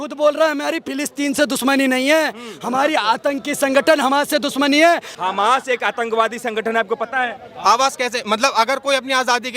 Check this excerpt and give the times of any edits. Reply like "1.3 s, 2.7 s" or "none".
5.1 s